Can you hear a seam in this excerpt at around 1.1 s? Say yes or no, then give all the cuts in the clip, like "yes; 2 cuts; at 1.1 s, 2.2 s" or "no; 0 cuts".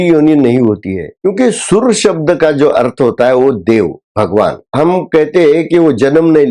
yes; 2 cuts; at 1.1 s, 4.7 s